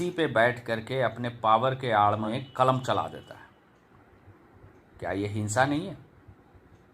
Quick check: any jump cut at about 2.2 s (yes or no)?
yes